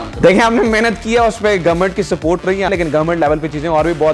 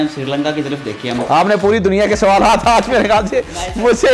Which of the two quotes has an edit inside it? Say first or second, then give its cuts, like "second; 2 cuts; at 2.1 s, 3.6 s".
first; 1 cut; at 2.7 s